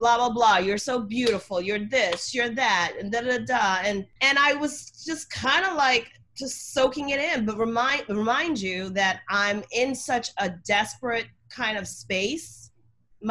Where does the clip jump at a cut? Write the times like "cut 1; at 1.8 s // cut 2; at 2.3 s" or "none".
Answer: none